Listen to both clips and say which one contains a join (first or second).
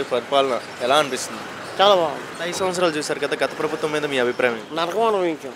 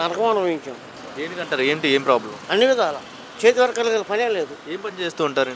first